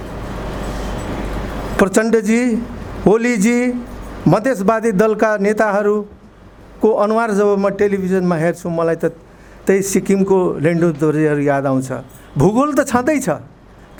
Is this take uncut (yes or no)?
yes